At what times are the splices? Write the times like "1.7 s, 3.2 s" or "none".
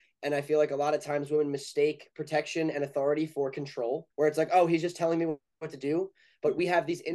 4.1 s